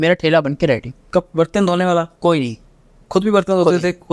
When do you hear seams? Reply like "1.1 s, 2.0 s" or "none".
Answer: 0.9 s